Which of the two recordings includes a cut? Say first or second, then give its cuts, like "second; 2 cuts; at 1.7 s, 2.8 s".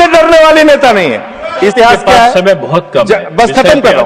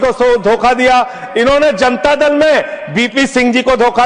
first; 1 cut; at 1.7 s